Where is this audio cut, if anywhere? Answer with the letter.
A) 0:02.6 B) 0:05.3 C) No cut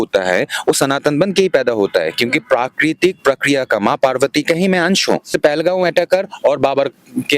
B